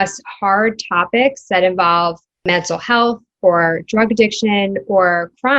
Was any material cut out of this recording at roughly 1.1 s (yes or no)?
no